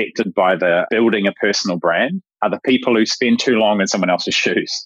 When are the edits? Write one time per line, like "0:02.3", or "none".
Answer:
0:00.9
0:02.2
0:03.2